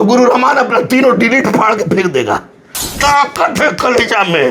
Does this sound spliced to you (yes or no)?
yes